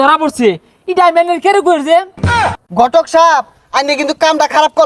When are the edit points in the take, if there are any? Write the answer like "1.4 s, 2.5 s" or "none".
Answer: 2.3 s